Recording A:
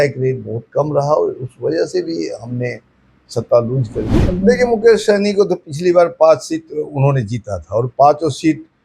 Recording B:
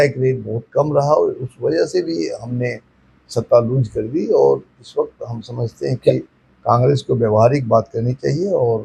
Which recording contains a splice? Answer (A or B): A